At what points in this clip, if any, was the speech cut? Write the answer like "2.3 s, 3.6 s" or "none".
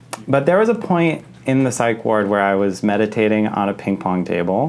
none